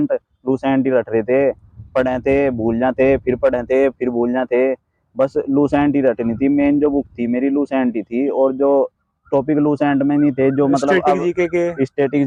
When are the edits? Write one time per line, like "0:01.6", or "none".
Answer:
none